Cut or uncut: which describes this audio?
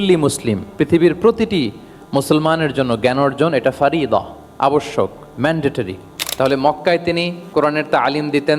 cut